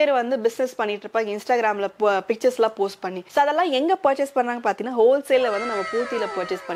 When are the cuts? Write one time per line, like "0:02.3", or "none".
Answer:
none